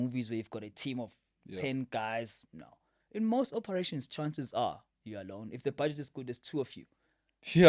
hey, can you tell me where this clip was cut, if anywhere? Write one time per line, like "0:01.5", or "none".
none